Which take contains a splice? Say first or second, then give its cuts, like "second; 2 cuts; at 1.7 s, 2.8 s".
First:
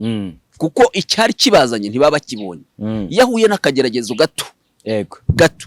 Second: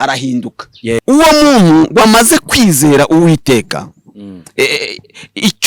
second; 1 cut; at 1.0 s